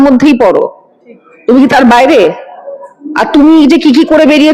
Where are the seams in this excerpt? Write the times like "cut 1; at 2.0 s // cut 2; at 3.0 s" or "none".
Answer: none